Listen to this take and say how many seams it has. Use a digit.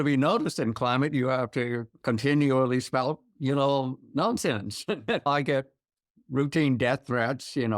1